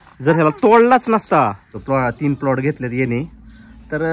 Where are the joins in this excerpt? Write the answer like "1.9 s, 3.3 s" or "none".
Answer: 1.7 s